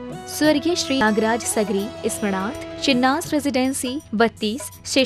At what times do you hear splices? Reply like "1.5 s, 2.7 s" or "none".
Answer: 1.0 s